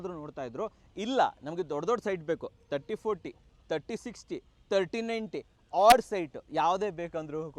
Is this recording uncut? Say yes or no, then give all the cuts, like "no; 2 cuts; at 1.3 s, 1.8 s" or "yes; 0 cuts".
yes; 0 cuts